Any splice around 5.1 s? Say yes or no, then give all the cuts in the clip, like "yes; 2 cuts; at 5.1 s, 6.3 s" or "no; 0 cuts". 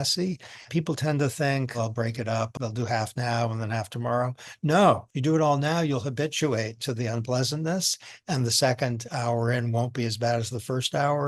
yes; 2 cuts; at 2.5 s, 5.1 s